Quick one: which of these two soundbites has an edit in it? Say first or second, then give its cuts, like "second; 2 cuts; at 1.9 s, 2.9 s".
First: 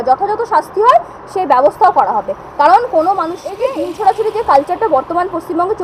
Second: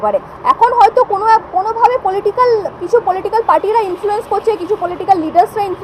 first; 1 cut; at 3.6 s